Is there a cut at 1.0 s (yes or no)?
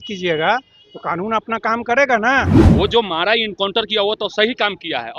no